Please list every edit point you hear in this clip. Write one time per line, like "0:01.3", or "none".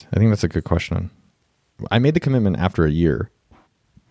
none